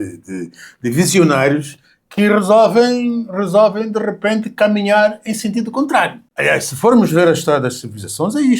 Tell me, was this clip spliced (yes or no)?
yes